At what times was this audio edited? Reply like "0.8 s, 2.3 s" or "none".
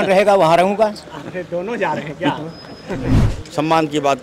3.2 s